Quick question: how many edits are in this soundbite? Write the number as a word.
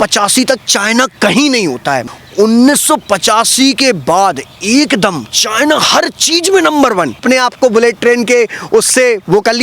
two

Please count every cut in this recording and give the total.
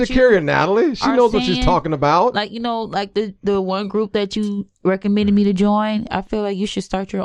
zero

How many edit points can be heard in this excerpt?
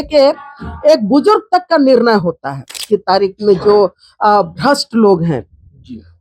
one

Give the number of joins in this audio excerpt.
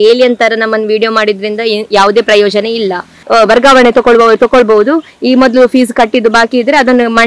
one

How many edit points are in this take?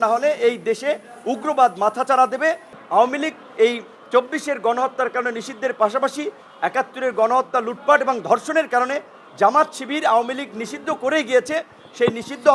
one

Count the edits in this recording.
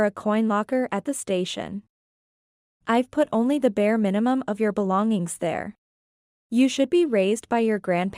zero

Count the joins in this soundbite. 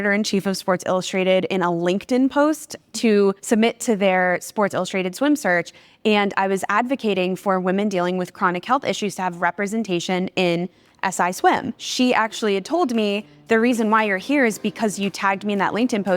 two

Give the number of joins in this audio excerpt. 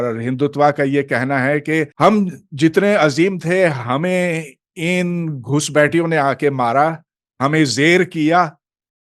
one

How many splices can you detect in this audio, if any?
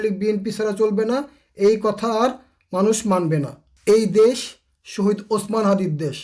one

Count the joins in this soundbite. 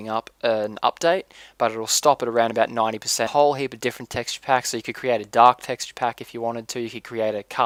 zero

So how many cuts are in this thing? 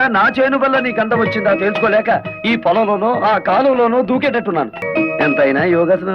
one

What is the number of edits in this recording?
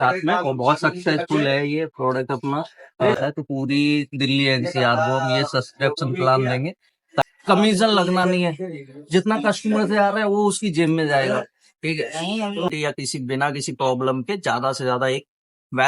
three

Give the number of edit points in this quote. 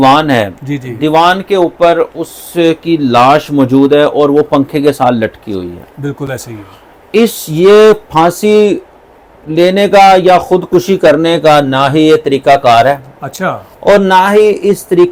zero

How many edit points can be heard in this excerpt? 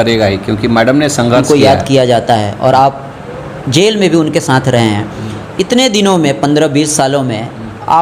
one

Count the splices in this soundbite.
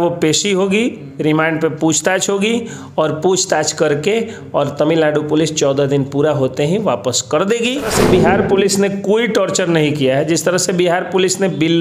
one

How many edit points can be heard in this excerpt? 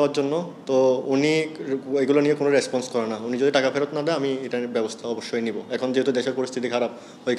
zero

